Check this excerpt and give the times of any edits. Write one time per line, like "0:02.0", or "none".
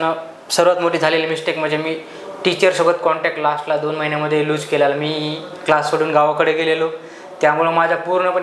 none